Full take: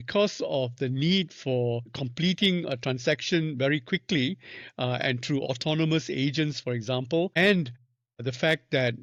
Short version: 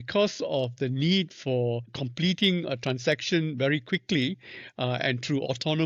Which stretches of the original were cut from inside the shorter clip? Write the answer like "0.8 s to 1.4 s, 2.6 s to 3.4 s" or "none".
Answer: none